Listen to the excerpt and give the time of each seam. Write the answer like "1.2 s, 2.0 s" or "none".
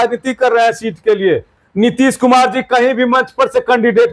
1.6 s